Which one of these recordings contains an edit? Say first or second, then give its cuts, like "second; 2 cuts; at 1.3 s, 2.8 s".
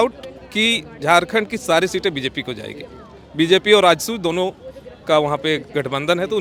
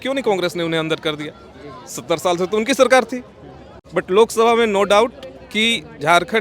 second; 1 cut; at 3.7 s